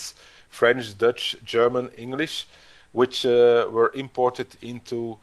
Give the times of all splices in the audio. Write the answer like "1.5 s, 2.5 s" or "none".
none